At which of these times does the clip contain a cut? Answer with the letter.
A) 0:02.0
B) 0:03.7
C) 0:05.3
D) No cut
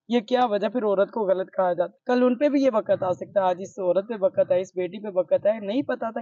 A